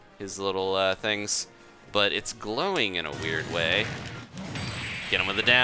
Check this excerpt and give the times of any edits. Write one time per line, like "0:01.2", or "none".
0:04.3